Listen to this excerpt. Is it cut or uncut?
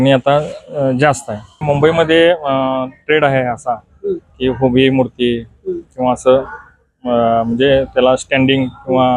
cut